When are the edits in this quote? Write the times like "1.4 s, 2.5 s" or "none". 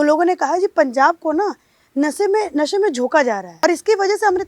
3.5 s